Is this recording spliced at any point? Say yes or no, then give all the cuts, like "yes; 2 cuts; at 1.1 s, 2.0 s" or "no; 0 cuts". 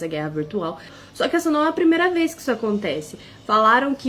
yes; 1 cut; at 0.9 s